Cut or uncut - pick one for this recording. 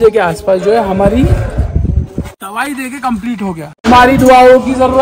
cut